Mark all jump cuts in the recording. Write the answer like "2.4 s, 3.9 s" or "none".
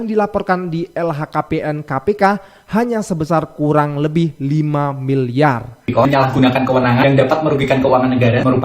5.9 s